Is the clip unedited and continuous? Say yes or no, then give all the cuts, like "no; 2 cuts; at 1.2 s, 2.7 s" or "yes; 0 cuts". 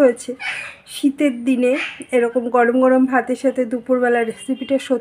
yes; 0 cuts